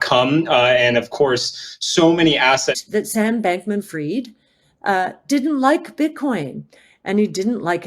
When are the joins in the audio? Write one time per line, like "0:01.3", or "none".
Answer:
0:02.8